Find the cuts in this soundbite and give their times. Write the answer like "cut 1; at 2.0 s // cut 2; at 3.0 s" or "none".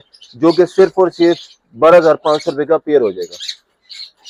none